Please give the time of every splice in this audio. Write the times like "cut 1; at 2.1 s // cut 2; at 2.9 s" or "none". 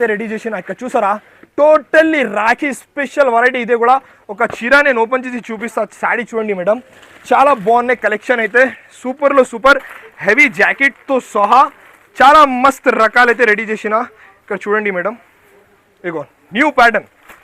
none